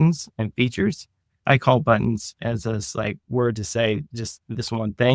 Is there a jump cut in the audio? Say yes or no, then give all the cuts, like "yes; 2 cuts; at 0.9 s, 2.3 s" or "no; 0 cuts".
yes; 1 cut; at 1.4 s